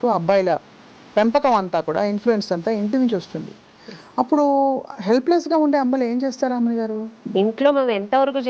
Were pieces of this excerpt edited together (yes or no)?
yes